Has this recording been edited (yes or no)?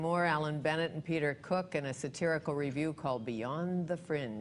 no